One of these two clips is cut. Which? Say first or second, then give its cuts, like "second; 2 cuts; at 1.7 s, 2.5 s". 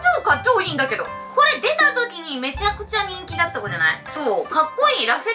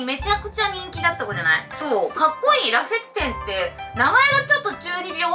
first; 1 cut; at 1.1 s